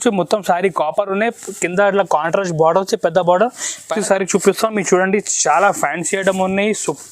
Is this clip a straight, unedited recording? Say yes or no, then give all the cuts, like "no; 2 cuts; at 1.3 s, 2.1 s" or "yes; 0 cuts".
no; 1 cut; at 4.0 s